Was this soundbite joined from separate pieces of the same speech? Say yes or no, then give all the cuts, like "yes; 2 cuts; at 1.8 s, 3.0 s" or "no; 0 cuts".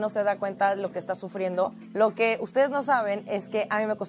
yes; 1 cut; at 1.8 s